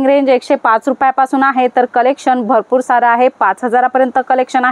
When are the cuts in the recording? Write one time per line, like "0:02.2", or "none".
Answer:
none